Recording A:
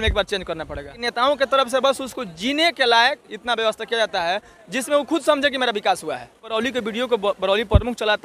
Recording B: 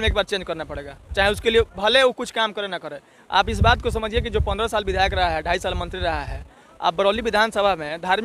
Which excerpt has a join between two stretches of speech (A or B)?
A